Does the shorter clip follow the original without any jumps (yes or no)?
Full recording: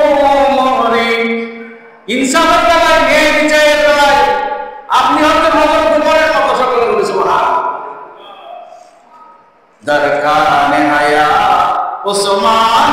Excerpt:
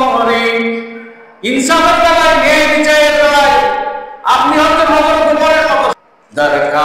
no